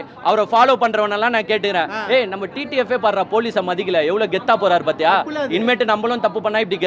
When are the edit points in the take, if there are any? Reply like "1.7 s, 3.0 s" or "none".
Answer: none